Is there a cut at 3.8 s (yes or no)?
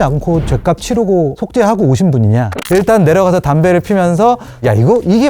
no